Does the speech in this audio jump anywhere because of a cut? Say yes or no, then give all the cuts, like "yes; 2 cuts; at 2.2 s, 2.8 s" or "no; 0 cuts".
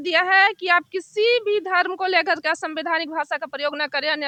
no; 0 cuts